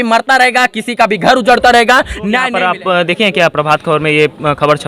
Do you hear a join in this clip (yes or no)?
yes